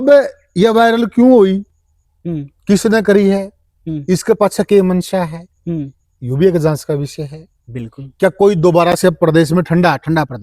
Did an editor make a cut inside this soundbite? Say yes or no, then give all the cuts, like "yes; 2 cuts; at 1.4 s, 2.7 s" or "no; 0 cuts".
no; 0 cuts